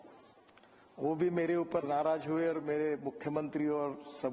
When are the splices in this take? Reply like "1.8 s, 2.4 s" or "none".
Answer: none